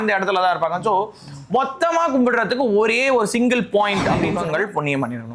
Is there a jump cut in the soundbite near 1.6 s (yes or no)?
no